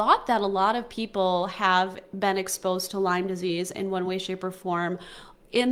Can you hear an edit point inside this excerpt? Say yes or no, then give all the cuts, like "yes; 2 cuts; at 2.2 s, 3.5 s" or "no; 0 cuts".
no; 0 cuts